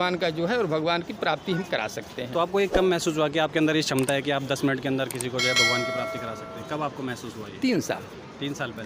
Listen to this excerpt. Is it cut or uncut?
uncut